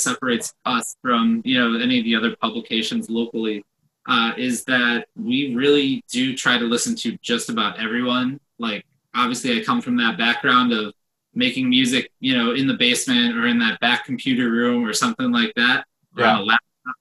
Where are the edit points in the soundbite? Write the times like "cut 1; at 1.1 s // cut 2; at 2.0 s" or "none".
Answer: none